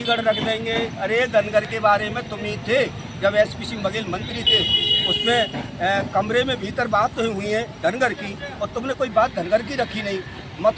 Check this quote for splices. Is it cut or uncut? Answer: uncut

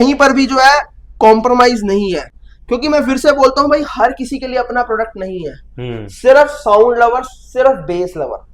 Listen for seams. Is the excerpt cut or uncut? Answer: uncut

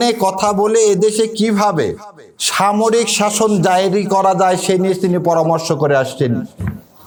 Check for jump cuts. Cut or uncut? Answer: uncut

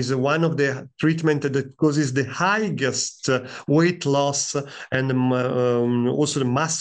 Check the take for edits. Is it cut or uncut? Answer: uncut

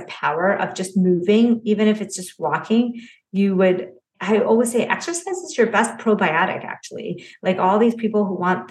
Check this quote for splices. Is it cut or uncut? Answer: uncut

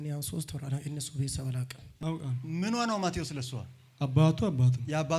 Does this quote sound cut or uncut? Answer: cut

